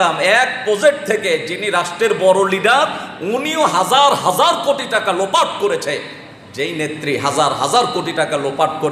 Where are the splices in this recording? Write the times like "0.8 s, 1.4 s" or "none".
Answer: none